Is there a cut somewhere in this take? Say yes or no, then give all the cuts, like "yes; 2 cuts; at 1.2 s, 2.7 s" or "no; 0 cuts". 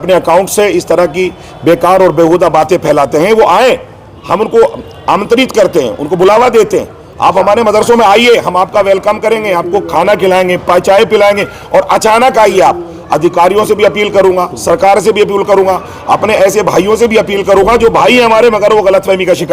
no; 0 cuts